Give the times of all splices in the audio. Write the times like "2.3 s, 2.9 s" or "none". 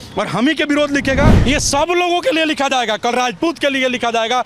1.4 s